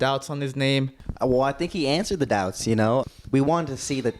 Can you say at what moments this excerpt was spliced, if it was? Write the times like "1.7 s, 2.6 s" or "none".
1.0 s, 3.0 s